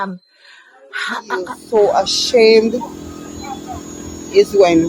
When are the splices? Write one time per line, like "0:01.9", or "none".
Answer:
0:01.6